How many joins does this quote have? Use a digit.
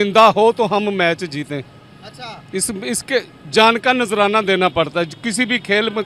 0